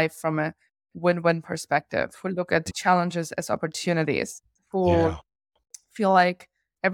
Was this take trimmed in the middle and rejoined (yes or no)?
no